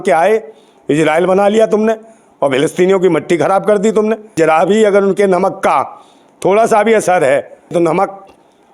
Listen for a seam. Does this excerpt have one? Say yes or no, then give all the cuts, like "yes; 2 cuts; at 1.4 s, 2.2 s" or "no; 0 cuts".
yes; 2 cuts; at 4.3 s, 7.7 s